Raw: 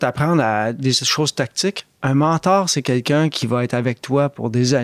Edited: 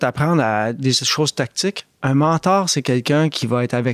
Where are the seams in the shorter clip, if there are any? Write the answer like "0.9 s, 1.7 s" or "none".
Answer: none